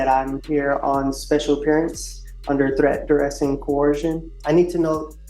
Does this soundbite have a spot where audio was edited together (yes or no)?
yes